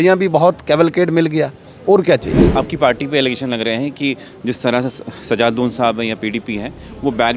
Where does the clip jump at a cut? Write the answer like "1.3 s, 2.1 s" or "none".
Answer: 2.5 s